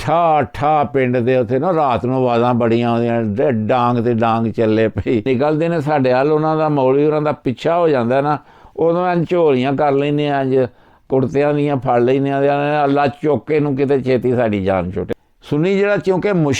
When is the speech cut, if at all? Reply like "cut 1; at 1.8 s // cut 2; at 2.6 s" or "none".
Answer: cut 1; at 5.3 s // cut 2; at 15.0 s